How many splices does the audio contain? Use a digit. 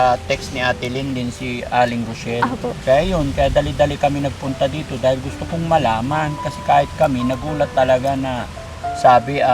1